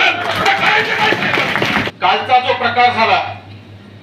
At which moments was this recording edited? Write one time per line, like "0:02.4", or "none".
0:01.9